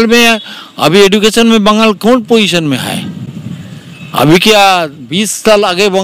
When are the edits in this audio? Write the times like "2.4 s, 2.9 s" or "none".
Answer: none